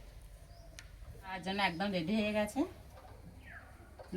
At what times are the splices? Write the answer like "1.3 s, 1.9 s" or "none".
1.2 s